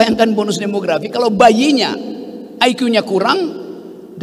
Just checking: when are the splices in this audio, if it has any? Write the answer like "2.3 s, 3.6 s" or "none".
none